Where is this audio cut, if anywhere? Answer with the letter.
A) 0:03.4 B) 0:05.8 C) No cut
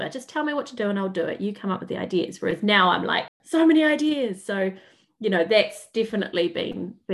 A